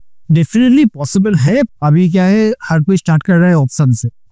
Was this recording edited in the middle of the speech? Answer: yes; 1 cut; at 1.7 s

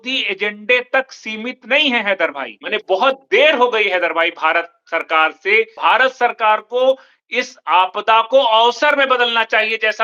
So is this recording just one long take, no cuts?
no; 2 cuts; at 2.5 s, 5.8 s

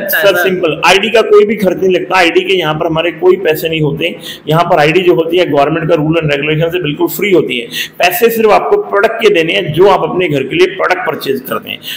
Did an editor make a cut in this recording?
no; 0 cuts

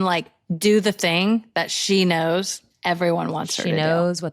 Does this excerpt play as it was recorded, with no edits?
yes; 0 cuts

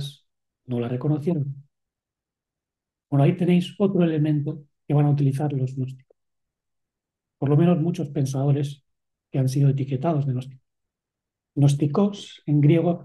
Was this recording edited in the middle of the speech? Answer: no; 0 cuts

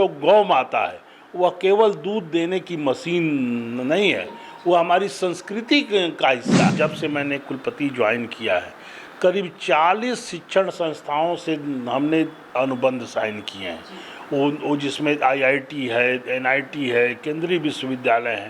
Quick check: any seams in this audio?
yes; 1 cut; at 6.7 s

